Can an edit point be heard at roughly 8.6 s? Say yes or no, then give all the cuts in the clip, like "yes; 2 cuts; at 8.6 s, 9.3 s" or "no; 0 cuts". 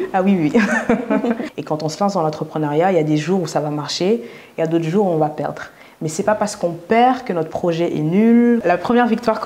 yes; 2 cuts; at 1.5 s, 8.6 s